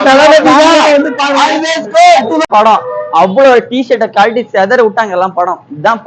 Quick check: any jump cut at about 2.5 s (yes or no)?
yes